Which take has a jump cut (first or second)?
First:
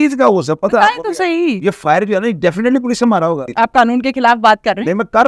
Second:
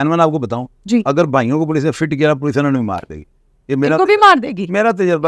first